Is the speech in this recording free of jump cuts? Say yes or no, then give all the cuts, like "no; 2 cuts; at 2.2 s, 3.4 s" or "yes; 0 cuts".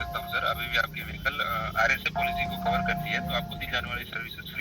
yes; 0 cuts